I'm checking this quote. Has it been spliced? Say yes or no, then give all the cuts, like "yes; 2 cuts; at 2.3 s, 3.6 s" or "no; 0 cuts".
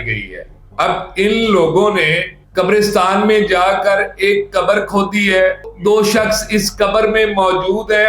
yes; 1 cut; at 5.7 s